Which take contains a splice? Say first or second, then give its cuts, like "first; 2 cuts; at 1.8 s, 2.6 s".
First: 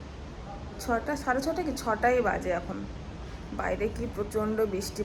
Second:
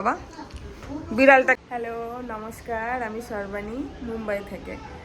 second; 1 cut; at 1.6 s